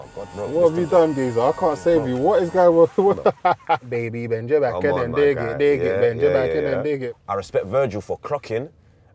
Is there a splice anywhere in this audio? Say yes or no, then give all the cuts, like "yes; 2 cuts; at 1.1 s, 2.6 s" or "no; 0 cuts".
yes; 2 cuts; at 3.9 s, 7.1 s